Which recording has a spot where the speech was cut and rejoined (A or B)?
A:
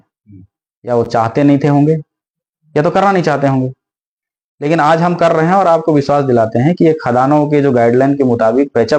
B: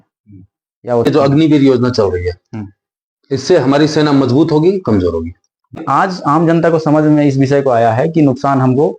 B